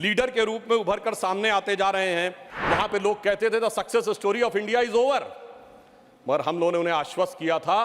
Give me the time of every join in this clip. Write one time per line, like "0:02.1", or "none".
0:02.5